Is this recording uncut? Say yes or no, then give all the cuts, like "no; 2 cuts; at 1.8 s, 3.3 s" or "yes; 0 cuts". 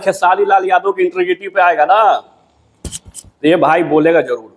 yes; 0 cuts